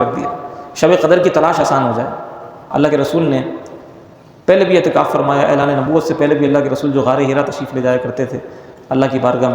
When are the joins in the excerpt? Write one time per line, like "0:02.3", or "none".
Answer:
0:02.6